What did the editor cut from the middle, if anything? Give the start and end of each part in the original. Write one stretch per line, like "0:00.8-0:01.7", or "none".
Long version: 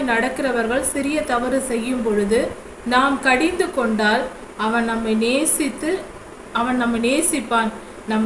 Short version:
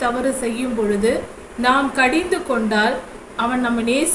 0:04.4-0:06.3